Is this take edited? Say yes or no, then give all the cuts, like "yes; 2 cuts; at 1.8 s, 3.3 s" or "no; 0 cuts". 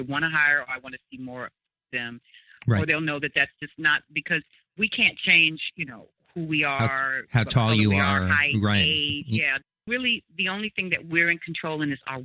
yes; 1 cut; at 9.6 s